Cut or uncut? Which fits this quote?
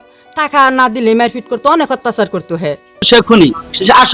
cut